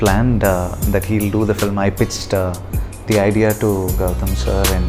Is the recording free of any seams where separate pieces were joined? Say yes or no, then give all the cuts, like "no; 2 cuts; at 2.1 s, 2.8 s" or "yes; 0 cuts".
yes; 0 cuts